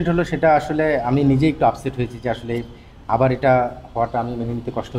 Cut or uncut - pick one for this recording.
uncut